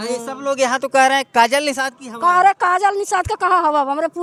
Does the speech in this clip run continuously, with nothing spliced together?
yes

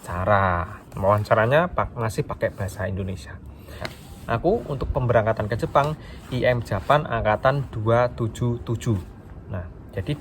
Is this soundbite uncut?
no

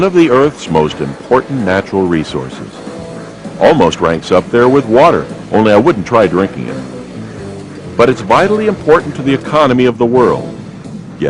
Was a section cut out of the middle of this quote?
no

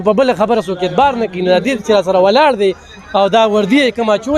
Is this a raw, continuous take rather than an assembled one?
yes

